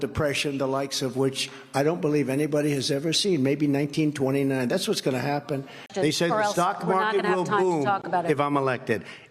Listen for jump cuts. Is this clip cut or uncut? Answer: cut